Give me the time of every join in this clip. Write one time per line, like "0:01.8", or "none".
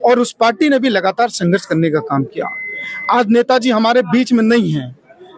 none